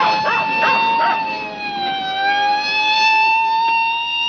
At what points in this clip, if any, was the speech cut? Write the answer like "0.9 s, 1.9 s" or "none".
none